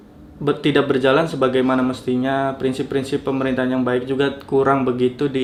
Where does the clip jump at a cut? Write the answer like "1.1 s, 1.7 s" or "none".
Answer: none